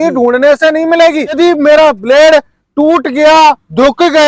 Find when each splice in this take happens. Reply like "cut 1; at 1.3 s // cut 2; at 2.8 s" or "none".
cut 1; at 1.3 s